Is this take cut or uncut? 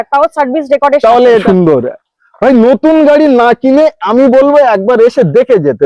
cut